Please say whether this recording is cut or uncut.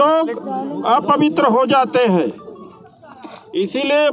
uncut